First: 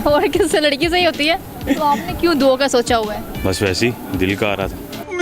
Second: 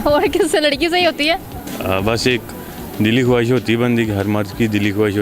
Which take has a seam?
first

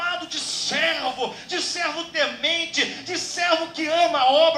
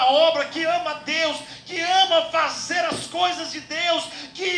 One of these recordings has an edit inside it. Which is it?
second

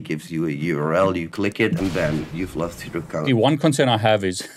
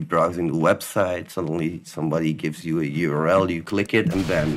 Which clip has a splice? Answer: first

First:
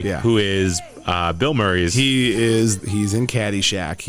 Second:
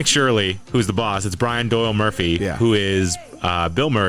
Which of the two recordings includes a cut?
first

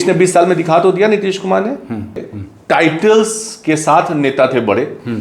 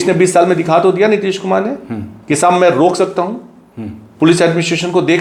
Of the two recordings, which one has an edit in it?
first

